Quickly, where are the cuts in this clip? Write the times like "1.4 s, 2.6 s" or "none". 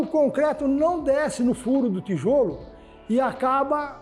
none

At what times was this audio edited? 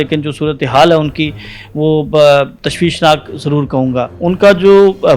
4.1 s

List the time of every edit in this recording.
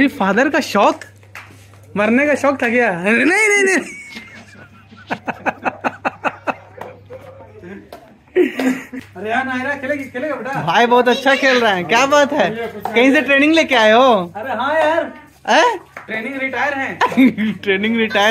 8.9 s

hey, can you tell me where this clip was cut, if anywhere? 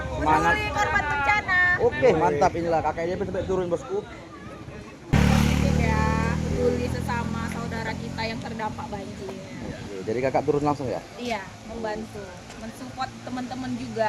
5.1 s

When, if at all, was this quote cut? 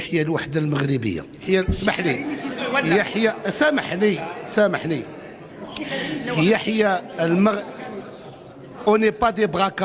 1.4 s

